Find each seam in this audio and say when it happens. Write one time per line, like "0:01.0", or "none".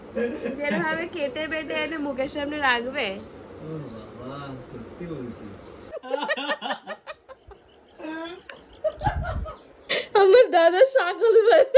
0:05.9
0:10.0